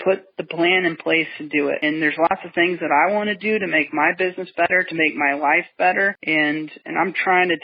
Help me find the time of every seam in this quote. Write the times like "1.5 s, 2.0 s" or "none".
1.8 s